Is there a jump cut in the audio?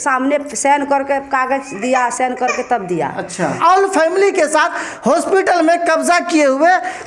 yes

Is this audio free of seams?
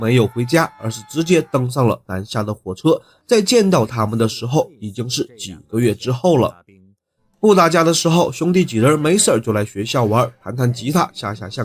yes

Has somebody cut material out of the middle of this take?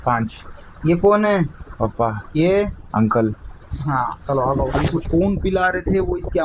yes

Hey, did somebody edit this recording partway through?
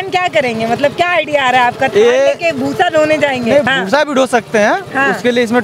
yes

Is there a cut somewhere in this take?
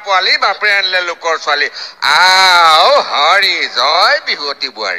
no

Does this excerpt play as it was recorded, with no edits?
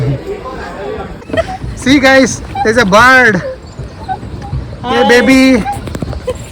no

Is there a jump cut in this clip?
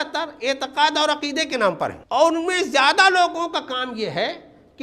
yes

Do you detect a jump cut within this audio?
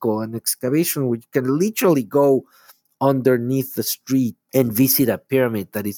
no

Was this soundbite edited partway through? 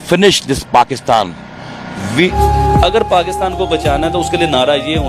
yes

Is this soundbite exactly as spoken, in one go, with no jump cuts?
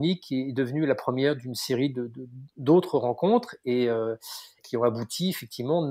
yes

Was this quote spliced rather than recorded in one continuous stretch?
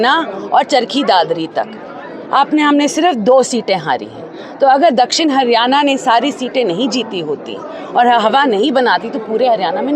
no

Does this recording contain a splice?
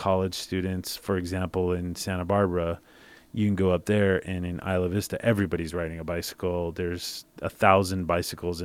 no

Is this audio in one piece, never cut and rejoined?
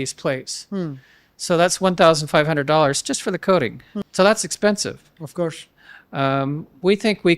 no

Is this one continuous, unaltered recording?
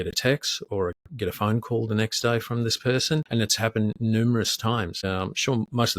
no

